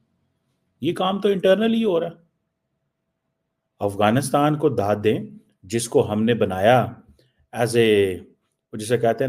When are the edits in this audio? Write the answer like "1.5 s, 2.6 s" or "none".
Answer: none